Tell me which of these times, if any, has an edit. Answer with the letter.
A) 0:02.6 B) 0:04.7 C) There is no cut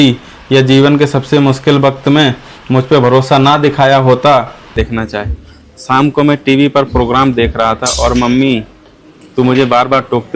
B